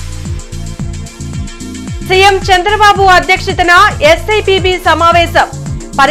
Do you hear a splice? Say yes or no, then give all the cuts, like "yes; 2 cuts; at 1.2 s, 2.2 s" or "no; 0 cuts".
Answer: no; 0 cuts